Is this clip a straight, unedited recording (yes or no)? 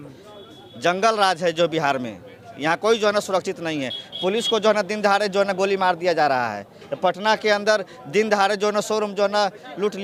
yes